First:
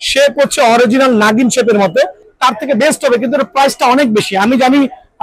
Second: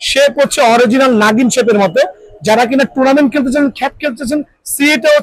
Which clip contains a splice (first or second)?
first